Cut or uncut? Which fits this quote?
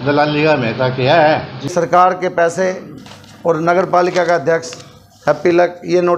cut